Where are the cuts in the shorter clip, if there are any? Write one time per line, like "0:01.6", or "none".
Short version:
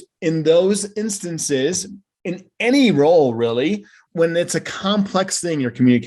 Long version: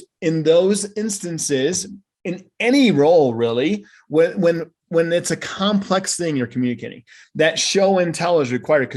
0:04.0